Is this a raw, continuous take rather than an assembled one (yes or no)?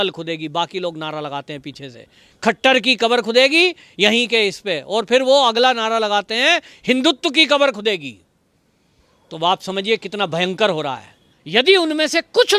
yes